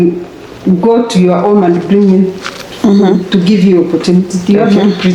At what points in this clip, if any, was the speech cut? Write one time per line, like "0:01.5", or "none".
none